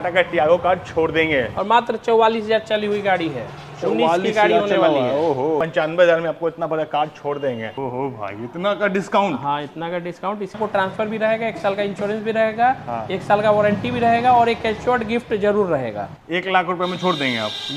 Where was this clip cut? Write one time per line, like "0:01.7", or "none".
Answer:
0:01.5
0:05.6
0:07.7
0:10.6
0:16.1